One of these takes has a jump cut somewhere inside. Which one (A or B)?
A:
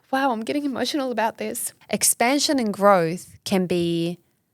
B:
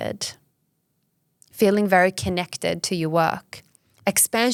A